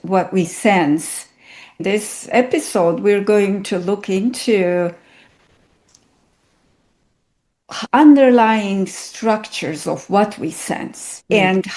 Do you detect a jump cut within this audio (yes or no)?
yes